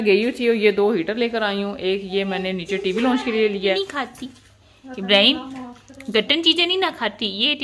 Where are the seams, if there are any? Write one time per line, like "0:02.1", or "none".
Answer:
0:03.8